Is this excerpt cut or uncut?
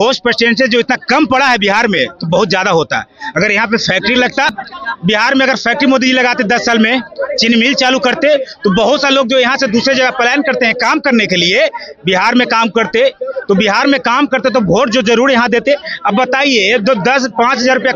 uncut